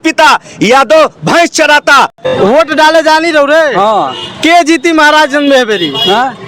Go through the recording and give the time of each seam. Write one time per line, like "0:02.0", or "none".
0:02.2